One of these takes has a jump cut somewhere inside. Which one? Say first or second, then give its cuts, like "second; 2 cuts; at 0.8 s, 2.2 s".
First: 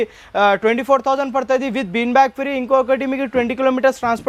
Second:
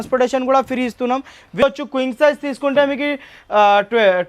second; 1 cut; at 1.6 s